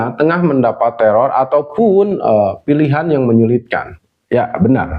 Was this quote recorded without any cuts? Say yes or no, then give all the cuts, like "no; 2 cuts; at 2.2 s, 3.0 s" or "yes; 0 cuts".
no; 1 cut; at 3.9 s